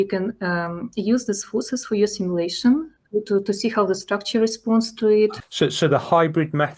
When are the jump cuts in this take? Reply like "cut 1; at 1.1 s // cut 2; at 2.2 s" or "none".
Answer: cut 1; at 3.0 s // cut 2; at 5.4 s